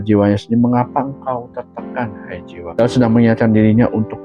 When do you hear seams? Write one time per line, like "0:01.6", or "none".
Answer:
0:02.6